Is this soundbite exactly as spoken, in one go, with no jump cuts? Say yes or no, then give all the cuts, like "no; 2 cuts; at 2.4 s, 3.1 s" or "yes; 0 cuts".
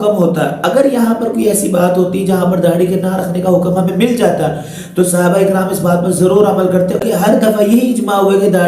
no; 1 cut; at 7.0 s